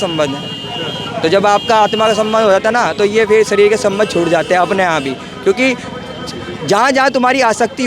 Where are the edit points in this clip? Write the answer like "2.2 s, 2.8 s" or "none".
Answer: none

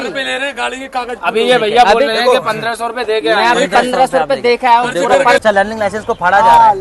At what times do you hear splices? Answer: 5.4 s

